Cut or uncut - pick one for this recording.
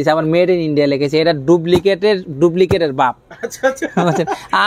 uncut